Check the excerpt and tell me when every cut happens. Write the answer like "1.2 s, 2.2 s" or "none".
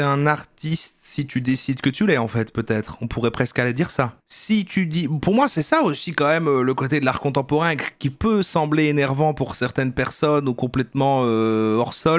none